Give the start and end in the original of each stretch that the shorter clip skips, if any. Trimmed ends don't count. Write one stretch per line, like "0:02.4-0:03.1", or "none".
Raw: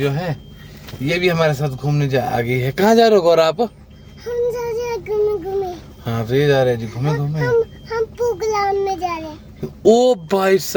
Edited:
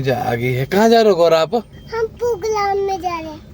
0:03.9-0:07.8